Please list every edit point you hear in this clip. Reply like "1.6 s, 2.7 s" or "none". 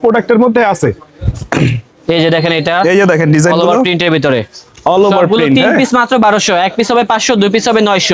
none